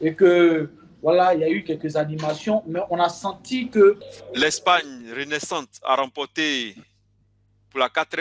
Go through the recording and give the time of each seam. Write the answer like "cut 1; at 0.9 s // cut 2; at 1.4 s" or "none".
cut 1; at 4.1 s